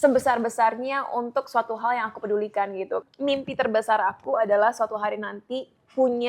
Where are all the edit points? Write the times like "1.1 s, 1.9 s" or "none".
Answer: 3.0 s